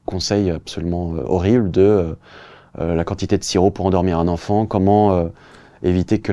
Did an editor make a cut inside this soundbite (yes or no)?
no